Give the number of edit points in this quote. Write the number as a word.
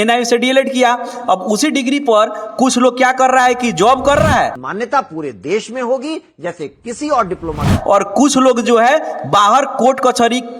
two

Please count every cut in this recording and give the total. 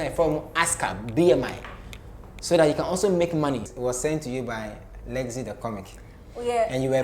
one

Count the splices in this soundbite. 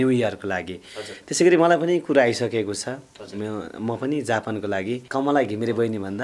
one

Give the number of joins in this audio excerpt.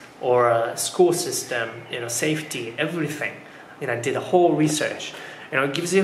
zero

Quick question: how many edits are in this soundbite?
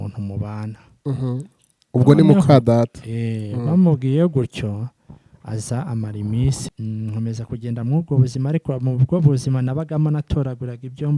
one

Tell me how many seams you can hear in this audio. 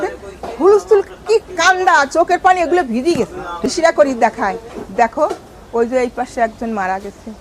one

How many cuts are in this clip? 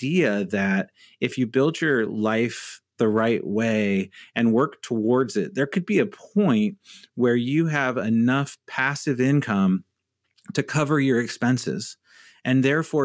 zero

